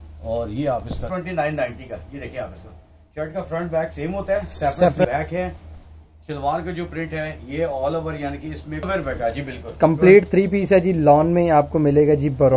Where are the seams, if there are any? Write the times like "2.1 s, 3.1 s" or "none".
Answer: 1.1 s, 5.1 s, 8.8 s